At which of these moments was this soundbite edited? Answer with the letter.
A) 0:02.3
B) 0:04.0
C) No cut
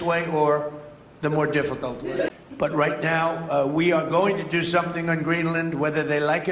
A